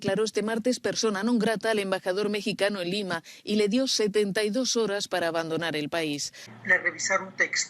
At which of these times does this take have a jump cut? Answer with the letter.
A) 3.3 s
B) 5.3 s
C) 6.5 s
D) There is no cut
C